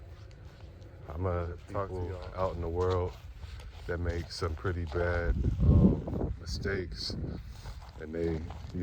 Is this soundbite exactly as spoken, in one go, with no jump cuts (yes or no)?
no